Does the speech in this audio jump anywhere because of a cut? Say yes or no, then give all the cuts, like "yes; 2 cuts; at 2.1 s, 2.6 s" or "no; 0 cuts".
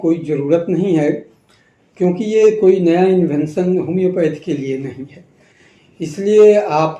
yes; 1 cut; at 5.5 s